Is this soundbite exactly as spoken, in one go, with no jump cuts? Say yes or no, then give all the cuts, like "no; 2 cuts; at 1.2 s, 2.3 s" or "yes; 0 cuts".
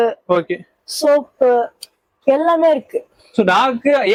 yes; 0 cuts